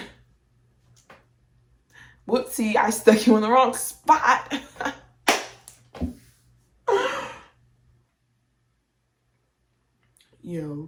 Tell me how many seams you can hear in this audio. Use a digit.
0